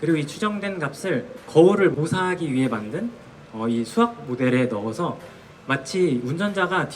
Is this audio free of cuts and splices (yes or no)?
no